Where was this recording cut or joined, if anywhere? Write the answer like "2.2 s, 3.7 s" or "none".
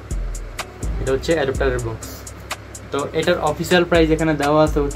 none